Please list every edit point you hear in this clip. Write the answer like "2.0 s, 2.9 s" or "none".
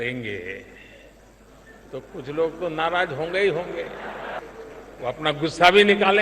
4.4 s